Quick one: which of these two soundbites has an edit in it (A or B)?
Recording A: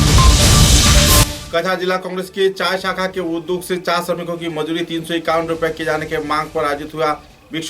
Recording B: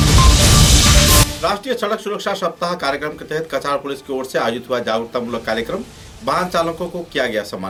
A